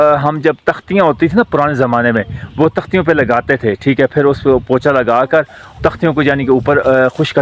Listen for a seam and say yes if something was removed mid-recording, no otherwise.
no